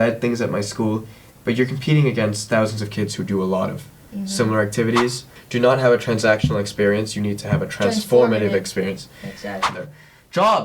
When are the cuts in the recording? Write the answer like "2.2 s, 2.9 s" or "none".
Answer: 5.4 s, 9.7 s